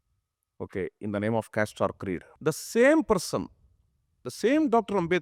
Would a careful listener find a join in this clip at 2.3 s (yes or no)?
yes